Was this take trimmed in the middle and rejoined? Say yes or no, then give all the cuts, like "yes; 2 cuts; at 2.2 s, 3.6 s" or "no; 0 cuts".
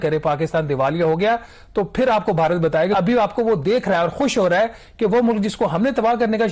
yes; 1 cut; at 2.9 s